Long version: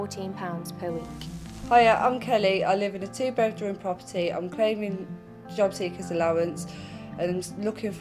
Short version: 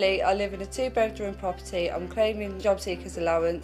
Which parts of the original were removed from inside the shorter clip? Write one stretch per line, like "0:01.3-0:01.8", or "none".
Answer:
0:04.9-0:05.4

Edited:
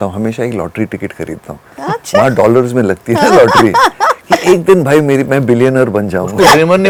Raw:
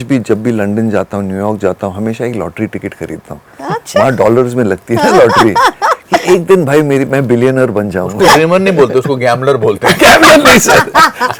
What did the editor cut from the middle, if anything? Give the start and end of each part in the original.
none

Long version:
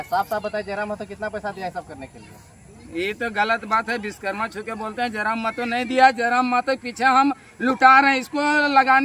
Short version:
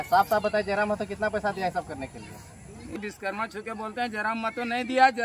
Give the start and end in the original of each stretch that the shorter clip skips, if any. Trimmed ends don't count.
0:03.0-0:04.0

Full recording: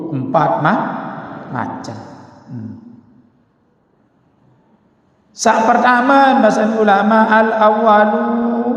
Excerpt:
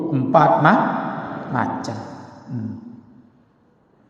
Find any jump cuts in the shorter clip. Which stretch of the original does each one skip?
none

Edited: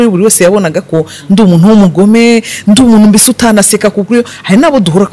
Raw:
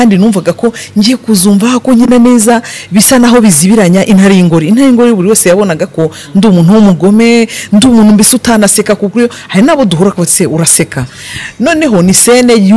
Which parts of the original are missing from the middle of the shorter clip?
none

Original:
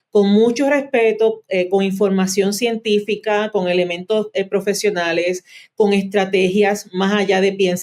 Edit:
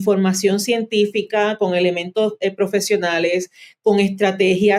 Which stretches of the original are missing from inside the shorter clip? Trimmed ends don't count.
none

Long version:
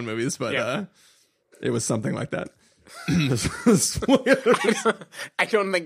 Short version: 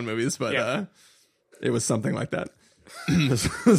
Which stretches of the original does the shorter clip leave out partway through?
none

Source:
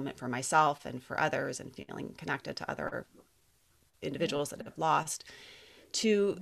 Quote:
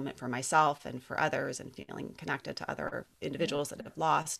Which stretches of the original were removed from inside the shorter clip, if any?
0:03.1-0:03.9

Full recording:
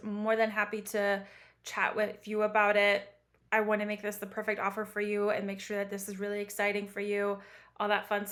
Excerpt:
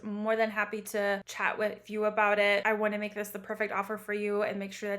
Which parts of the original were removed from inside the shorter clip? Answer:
0:01.3-0:01.7
0:03.0-0:03.5

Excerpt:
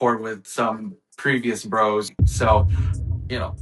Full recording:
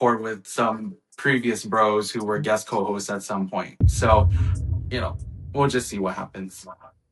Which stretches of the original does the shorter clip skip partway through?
0:02.1-0:03.7

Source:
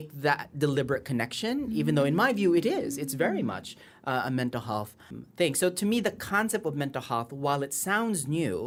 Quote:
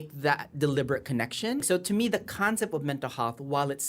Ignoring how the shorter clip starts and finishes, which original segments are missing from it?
0:01.6-0:05.6

